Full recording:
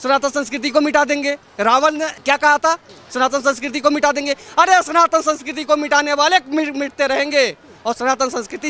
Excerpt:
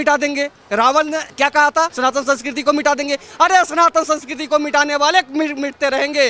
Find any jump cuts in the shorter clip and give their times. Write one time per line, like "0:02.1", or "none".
0:01.9